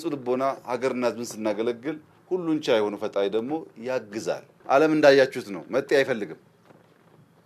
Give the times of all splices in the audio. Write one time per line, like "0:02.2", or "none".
0:04.5